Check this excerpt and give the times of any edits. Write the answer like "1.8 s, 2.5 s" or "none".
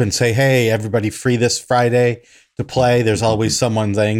none